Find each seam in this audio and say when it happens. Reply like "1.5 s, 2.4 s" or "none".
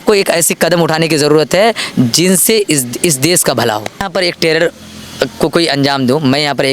4.1 s